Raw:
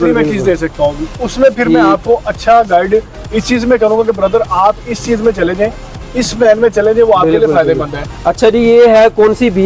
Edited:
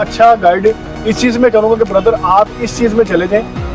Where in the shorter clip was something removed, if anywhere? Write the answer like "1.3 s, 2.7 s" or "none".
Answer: none